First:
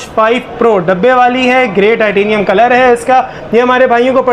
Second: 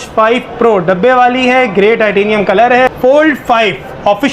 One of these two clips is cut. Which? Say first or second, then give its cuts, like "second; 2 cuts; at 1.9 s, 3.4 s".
second; 1 cut; at 2.9 s